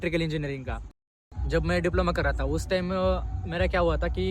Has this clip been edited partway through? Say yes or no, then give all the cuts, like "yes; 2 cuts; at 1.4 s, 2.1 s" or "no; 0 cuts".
yes; 1 cut; at 1.0 s